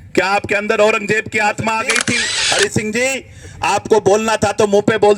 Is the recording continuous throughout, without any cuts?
no; 1 cut; at 2.3 s

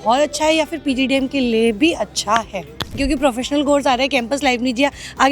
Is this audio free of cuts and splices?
no; 1 cut; at 3.0 s

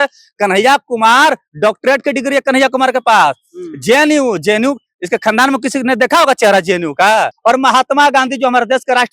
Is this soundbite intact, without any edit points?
no; 1 cut; at 7.3 s

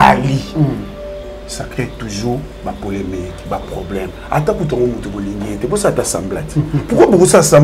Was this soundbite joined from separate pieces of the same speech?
no; 0 cuts

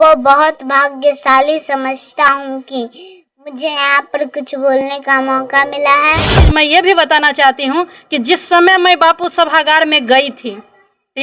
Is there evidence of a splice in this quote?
yes; 1 cut; at 6.4 s

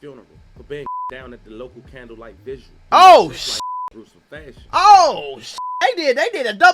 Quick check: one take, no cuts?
no; 1 cut; at 2.8 s

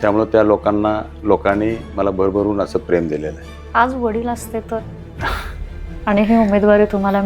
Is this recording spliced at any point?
yes; 1 cut; at 3.6 s

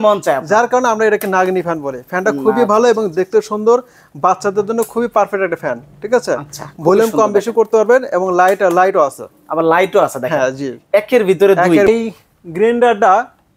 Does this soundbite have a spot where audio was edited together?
yes; 1 cut; at 11.9 s

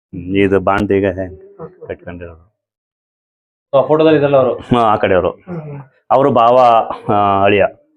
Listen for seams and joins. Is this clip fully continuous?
yes; 0 cuts

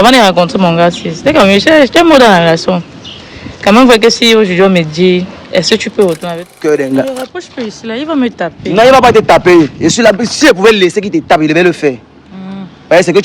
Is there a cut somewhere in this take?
yes; 1 cut; at 6.5 s

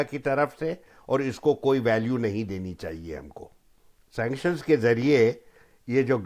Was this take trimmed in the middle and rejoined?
yes; 1 cut; at 3.6 s

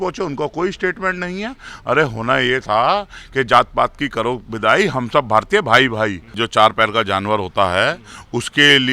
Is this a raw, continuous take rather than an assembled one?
no; 1 cut; at 6.3 s

